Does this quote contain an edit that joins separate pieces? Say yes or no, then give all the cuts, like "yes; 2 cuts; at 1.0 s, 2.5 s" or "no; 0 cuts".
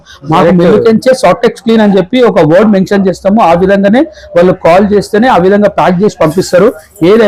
no; 0 cuts